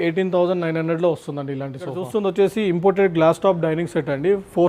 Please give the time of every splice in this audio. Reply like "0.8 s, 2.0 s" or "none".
2.0 s